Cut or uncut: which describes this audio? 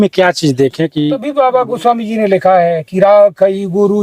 cut